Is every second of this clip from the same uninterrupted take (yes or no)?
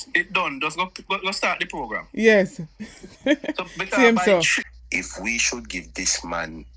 no